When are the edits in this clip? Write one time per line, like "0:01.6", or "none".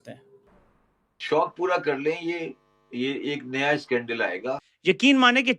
0:04.6